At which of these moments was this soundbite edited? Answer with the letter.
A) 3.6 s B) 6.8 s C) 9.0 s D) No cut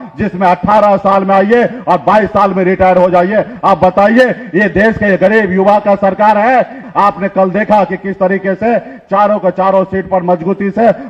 B